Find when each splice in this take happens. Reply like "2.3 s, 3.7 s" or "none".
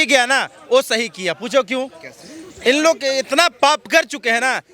none